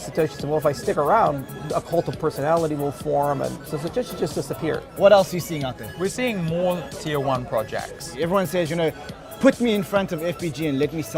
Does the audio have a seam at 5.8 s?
yes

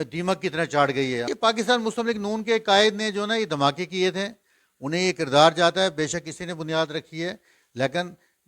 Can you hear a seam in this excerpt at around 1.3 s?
yes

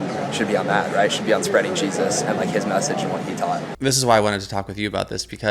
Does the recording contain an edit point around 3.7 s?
yes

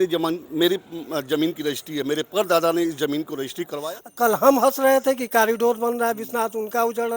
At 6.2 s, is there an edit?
no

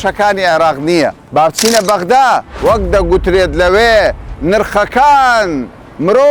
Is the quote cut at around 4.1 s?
no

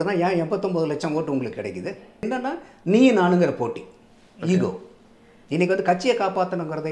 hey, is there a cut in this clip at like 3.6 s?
no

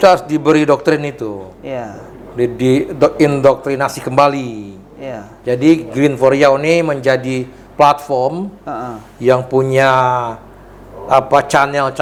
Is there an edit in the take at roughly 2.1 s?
no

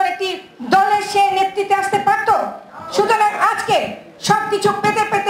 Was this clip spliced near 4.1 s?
no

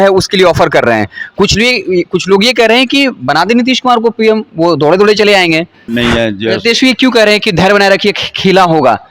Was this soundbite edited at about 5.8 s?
yes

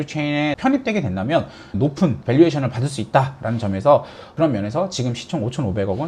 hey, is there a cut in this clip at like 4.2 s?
yes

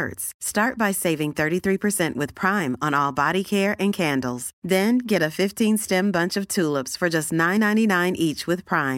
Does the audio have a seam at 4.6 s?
no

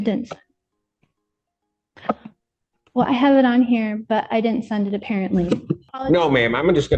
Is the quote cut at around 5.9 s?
yes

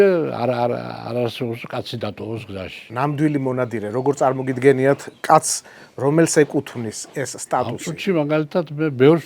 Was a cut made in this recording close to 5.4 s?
no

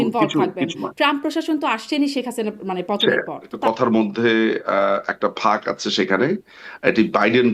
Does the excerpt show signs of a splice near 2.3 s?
no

